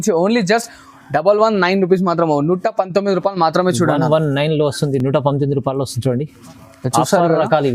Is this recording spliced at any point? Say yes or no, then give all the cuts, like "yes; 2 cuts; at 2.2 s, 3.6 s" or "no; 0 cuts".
no; 0 cuts